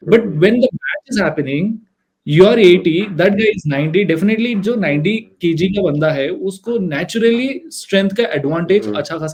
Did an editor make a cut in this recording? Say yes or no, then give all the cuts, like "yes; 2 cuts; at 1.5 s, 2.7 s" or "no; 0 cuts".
no; 0 cuts